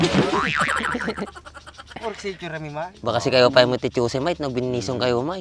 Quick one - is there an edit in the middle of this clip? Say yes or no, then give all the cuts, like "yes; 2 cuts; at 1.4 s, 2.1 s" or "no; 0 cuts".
no; 0 cuts